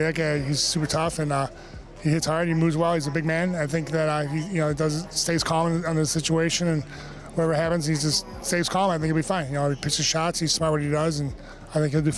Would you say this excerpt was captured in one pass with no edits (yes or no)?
yes